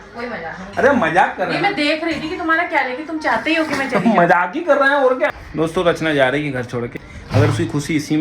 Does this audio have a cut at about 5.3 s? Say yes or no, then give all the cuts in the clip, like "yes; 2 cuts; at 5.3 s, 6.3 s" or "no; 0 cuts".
yes; 1 cut; at 5.3 s